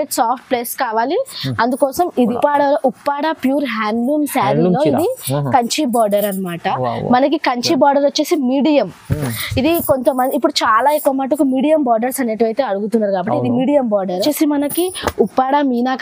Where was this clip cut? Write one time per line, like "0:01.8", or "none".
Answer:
0:02.3
0:14.2